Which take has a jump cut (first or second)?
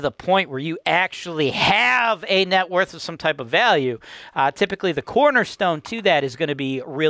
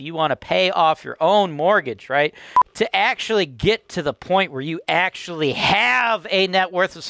second